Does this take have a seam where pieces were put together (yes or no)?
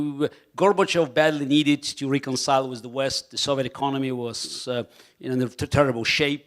yes